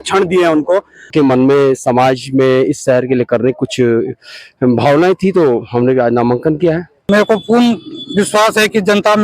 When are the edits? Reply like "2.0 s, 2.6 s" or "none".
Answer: 1.1 s, 6.9 s